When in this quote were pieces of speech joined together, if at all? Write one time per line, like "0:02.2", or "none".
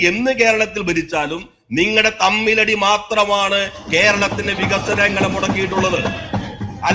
none

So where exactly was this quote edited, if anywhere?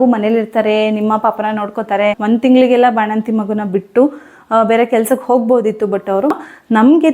0:02.2
0:06.3

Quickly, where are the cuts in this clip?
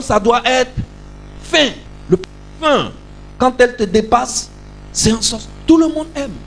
0:01.9

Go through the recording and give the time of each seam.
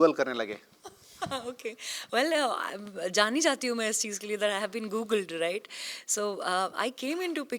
none

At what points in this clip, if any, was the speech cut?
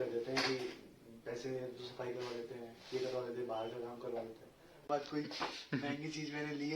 0:04.9

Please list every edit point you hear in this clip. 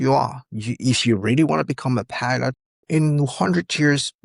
0:02.7

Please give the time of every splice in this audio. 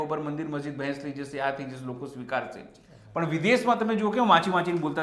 none

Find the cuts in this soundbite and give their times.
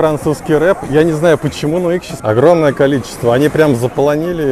none

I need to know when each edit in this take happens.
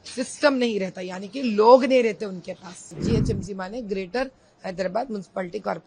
0:03.0

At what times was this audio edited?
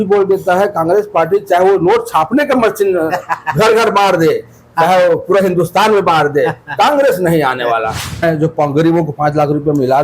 0:08.0

